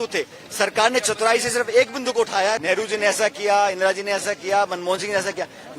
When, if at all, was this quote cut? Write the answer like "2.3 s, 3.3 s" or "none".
2.6 s